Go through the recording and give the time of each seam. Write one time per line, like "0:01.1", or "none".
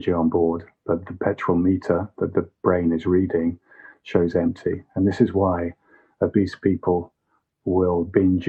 none